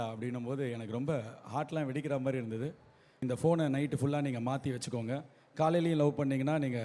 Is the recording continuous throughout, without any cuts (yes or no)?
no